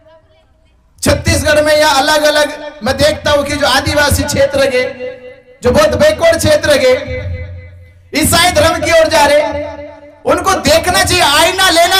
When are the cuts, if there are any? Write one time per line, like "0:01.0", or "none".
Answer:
none